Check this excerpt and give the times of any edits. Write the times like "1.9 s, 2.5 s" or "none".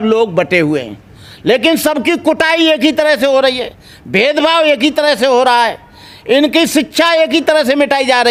none